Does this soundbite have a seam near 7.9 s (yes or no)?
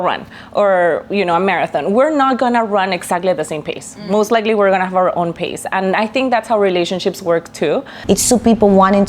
yes